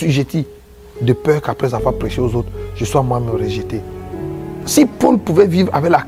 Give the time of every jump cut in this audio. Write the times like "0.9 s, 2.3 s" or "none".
none